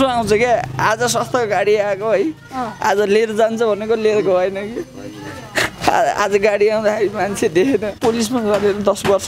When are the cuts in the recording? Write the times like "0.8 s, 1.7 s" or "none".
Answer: 8.0 s